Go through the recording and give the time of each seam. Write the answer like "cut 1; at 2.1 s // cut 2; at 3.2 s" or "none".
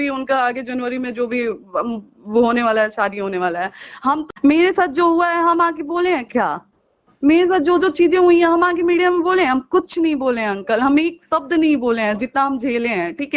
cut 1; at 4.3 s